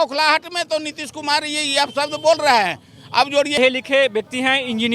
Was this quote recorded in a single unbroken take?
no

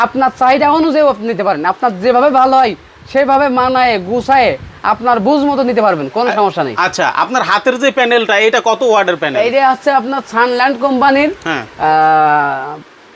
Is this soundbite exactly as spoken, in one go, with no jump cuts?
yes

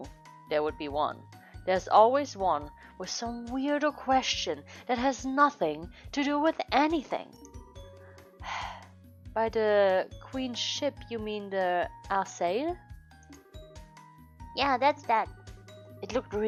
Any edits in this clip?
no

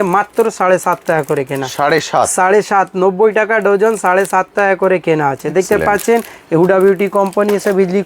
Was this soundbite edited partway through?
no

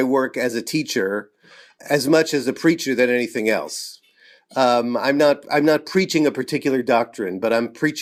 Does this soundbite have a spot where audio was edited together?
no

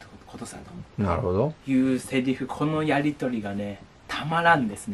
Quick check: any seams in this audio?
no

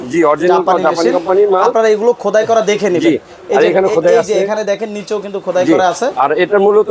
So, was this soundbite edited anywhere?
no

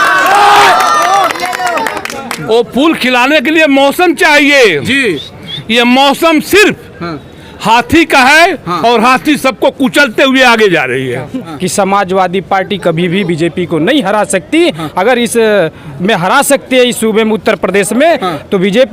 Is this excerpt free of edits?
no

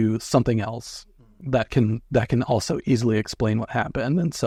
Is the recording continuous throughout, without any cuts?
yes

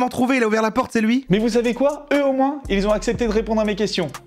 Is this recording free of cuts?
yes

